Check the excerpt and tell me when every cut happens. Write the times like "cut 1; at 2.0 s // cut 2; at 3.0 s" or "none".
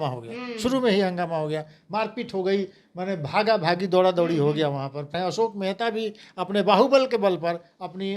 cut 1; at 5.1 s